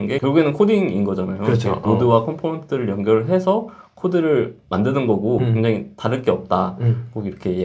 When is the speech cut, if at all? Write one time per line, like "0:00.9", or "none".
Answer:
none